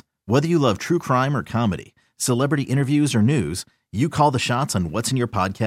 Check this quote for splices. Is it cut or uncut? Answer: uncut